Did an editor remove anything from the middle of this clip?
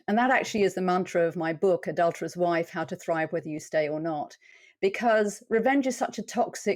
no; 0 cuts

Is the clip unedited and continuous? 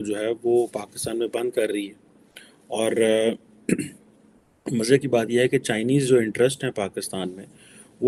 yes; 0 cuts

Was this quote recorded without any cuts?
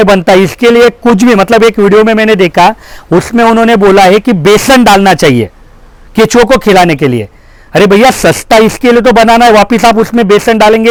yes; 0 cuts

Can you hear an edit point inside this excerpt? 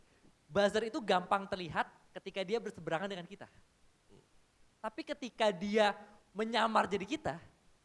no; 0 cuts

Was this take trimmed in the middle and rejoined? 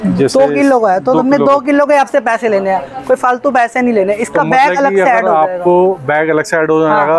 no; 0 cuts

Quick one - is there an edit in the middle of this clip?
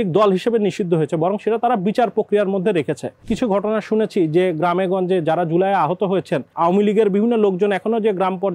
yes; 2 cuts; at 3.3 s, 6.5 s

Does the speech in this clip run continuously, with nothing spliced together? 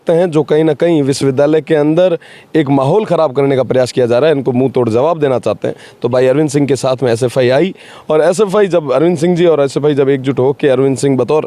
yes; 0 cuts

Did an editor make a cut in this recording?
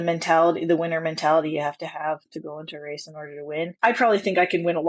yes; 1 cut; at 3.7 s

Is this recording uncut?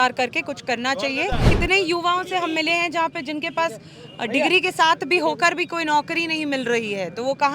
no; 1 cut; at 1.5 s

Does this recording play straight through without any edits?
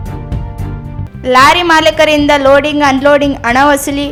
yes; 0 cuts

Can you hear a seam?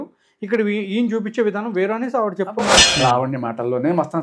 yes; 1 cut; at 2.9 s

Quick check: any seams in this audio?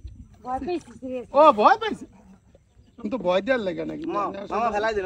no; 0 cuts

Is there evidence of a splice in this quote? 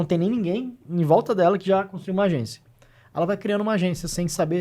no; 0 cuts

